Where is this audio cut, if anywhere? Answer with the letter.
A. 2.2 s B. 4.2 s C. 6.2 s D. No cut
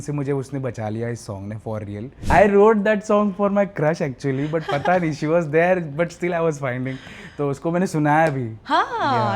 A